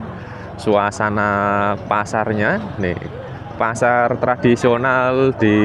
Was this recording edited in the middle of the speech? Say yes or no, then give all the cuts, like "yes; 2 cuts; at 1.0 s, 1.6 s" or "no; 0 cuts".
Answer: no; 0 cuts